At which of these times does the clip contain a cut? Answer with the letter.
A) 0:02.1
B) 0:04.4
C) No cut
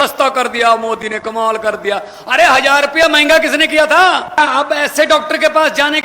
B